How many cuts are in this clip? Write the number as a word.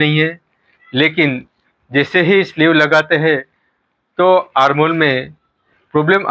zero